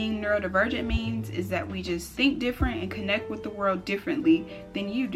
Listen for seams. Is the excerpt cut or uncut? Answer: uncut